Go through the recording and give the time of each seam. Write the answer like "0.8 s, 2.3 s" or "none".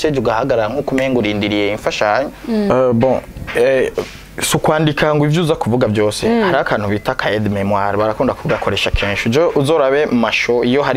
2.7 s